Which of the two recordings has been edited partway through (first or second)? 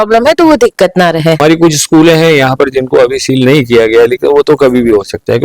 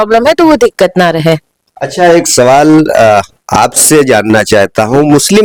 first